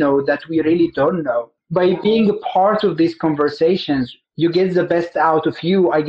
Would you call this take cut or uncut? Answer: cut